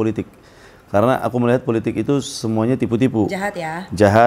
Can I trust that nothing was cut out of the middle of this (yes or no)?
yes